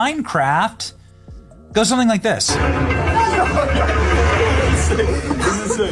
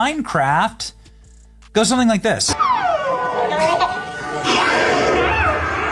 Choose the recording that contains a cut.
second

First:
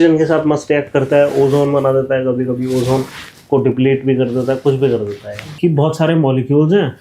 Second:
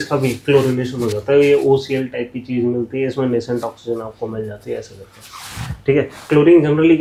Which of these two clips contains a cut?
first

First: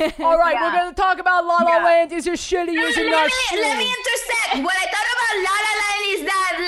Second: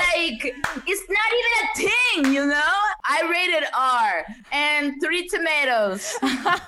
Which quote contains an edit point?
second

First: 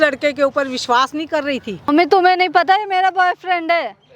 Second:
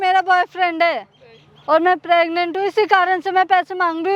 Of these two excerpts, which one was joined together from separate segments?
first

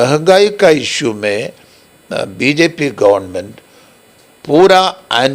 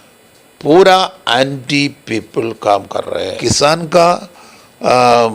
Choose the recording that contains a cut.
second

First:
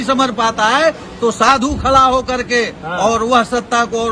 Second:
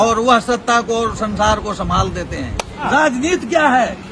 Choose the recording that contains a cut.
second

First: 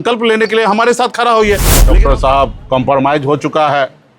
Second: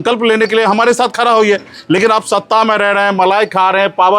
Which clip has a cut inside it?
first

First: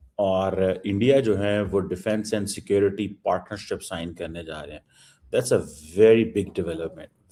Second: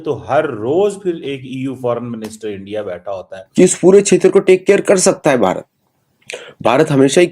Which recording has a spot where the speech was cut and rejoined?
second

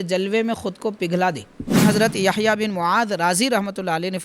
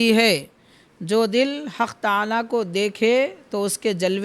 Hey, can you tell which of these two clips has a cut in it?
first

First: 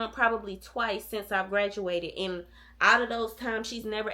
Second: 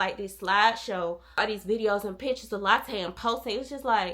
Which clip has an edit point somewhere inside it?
second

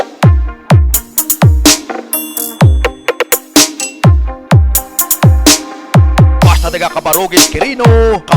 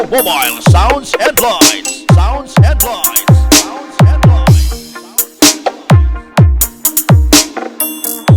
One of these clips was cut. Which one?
first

